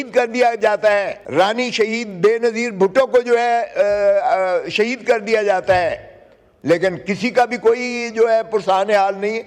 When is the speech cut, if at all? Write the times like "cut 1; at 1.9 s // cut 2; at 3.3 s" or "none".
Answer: cut 1; at 1.2 s